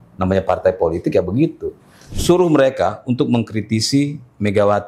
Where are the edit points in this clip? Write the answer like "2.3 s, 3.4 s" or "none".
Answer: 2.1 s